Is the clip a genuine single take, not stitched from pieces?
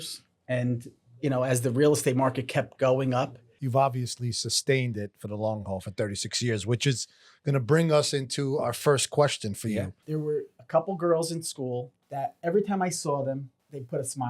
no; 2 cuts; at 3.6 s, 10.0 s

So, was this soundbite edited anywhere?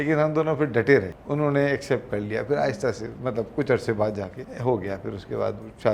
yes; 2 cuts; at 1.2 s, 4.4 s

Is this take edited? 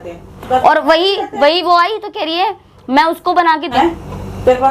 yes; 1 cut; at 3.7 s

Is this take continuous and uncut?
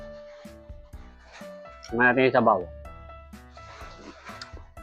no; 2 cuts; at 1.8 s, 2.7 s

